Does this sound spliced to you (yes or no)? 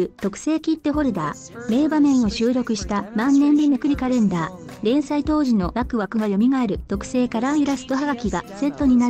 no